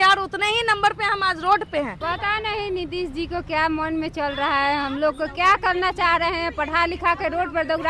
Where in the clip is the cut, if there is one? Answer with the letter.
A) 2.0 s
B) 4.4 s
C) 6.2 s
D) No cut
A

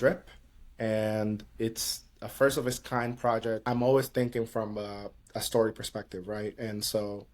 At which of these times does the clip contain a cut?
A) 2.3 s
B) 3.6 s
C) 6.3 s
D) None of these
B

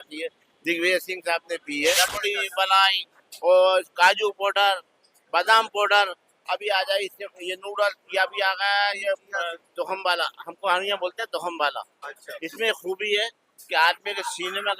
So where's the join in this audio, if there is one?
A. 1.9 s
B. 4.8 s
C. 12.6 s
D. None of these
A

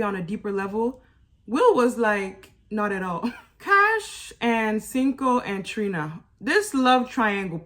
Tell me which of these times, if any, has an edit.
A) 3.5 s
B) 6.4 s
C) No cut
A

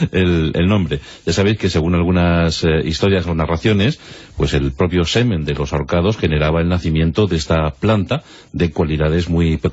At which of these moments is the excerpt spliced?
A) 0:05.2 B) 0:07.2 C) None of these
A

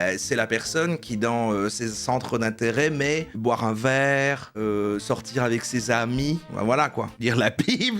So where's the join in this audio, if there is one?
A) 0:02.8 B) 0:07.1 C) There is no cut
B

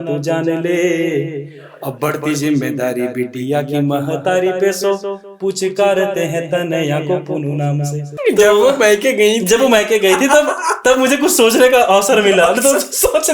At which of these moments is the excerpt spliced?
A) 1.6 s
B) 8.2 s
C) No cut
B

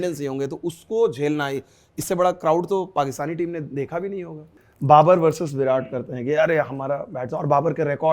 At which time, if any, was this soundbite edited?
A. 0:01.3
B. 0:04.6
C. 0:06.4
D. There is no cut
B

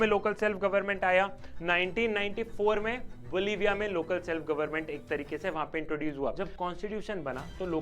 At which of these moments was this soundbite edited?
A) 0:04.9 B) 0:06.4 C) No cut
B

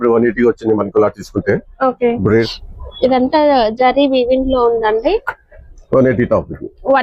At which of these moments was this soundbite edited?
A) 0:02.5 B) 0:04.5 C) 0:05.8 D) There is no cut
A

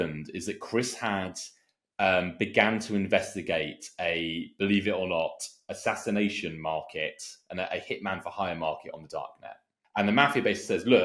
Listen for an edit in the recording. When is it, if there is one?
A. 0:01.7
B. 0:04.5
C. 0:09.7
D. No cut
C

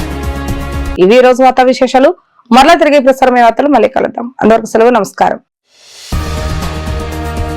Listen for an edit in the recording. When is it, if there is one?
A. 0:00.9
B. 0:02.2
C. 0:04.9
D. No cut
D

